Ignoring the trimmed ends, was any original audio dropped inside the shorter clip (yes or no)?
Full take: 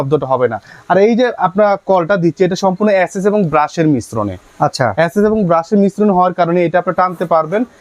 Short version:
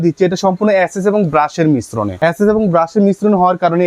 yes